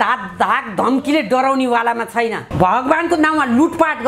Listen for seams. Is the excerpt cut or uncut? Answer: cut